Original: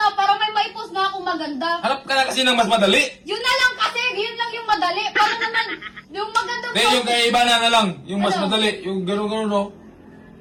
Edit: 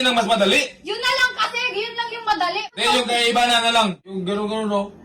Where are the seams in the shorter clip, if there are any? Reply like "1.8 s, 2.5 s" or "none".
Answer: 2.7 s, 4.0 s